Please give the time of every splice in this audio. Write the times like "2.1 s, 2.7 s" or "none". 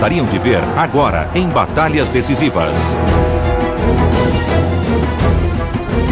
4.6 s